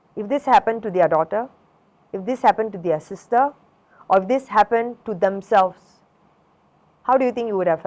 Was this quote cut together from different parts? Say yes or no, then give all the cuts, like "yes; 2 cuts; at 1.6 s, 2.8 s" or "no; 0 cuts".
no; 0 cuts